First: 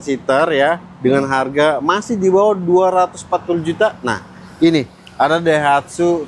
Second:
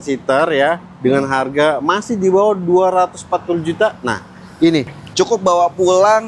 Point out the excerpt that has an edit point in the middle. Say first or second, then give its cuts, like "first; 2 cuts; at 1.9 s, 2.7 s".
second; 1 cut; at 5.0 s